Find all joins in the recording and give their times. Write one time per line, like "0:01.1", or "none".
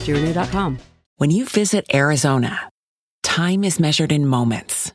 0:01.0